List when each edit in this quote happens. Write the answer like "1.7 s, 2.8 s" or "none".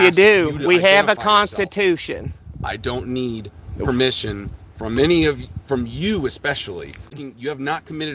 7.2 s